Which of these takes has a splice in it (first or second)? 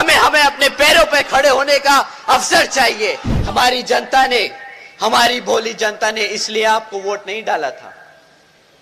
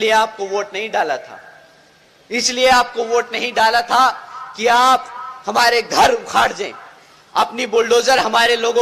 first